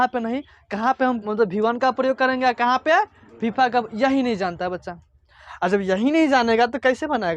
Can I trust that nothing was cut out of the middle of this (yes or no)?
no